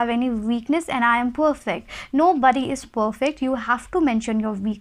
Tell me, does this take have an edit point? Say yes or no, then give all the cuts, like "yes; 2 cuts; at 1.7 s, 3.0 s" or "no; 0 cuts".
no; 0 cuts